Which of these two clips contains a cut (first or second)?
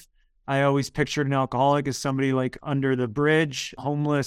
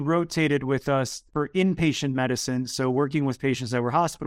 second